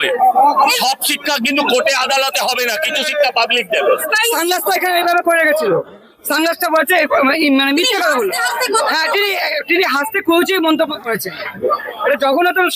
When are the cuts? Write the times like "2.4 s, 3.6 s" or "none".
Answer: 4.1 s